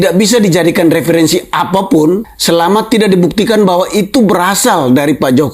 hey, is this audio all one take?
no; 1 cut; at 2.3 s

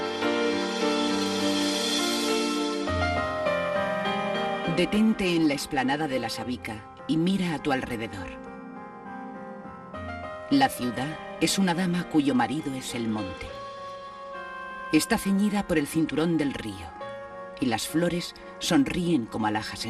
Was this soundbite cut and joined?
yes; 1 cut; at 16.8 s

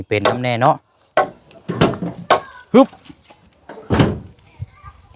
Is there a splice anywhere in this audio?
yes; 1 cut; at 1.5 s

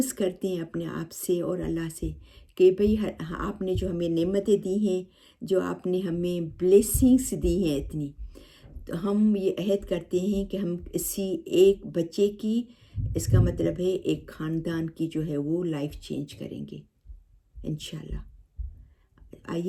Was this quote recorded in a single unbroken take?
yes; 0 cuts

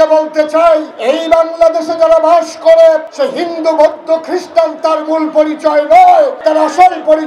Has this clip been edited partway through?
yes; 3 cuts; at 0.9 s, 3.1 s, 6.4 s

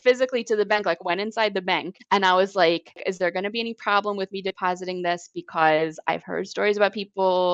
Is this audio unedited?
no; 2 cuts; at 1.9 s, 3.1 s

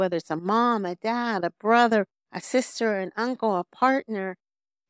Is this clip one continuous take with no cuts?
yes; 0 cuts

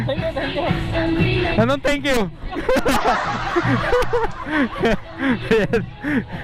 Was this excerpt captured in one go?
yes; 0 cuts

